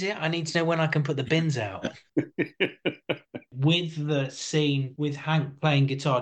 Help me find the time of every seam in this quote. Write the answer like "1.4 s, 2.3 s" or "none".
2.0 s, 3.5 s, 4.9 s